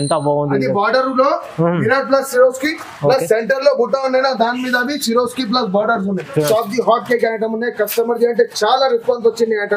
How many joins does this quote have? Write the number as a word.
one